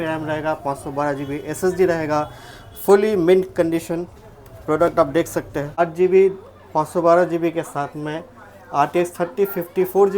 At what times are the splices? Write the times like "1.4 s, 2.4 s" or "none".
5.8 s